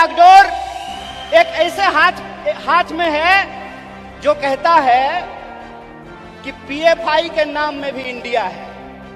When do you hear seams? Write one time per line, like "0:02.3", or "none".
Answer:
none

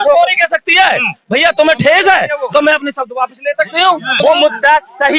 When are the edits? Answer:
none

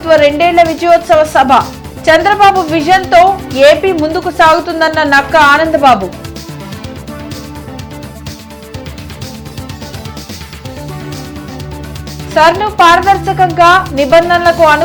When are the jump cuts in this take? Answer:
none

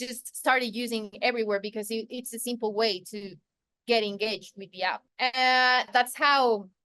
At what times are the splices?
0:05.0
0:05.9

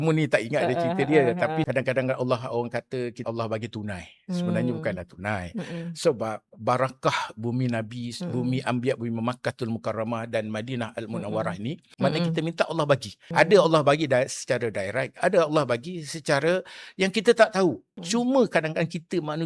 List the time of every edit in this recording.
0:01.7
0:03.2
0:11.8
0:13.2
0:17.9

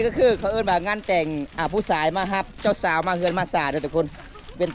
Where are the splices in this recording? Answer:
0:02.6

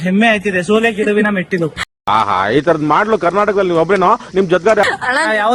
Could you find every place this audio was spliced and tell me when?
none

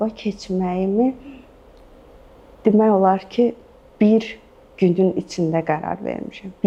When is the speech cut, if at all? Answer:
none

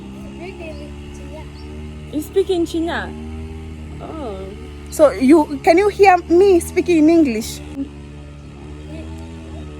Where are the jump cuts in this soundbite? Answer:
0:07.8

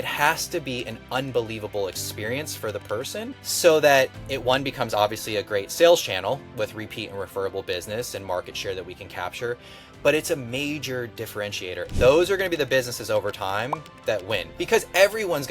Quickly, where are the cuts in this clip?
0:03.4
0:11.9

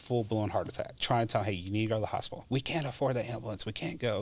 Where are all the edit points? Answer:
0:01.0
0:02.3

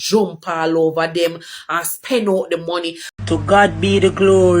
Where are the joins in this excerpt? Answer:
0:03.0

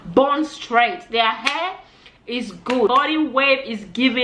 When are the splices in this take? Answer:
0:02.9

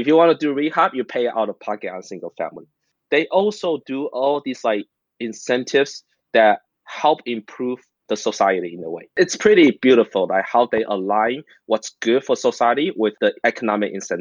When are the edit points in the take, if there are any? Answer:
0:13.3

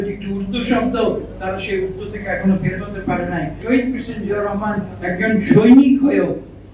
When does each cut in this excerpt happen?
0:03.5

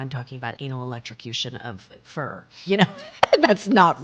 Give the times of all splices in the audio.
none

